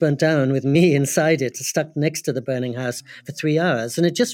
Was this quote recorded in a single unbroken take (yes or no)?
yes